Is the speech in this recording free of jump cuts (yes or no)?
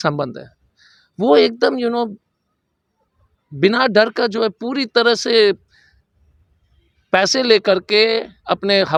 yes